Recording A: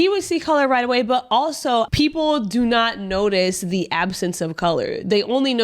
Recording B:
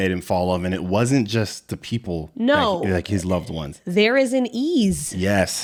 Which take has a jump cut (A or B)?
A